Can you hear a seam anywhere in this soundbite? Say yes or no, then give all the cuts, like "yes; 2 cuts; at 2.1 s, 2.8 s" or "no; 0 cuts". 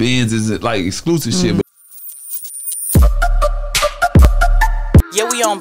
yes; 1 cut; at 1.6 s